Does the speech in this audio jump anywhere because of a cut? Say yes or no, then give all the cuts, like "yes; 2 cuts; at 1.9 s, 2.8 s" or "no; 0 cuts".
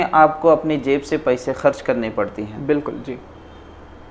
no; 0 cuts